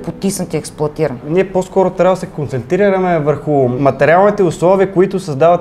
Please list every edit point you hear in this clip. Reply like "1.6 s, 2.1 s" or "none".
1.3 s, 3.8 s